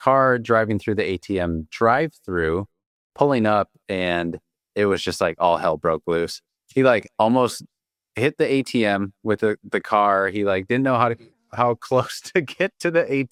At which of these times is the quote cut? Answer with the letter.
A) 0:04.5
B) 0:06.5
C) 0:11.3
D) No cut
D